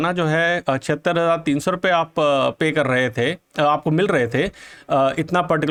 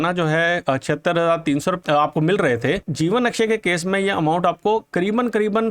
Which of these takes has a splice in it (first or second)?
second